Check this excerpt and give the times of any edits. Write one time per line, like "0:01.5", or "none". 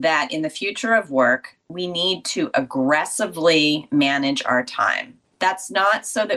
none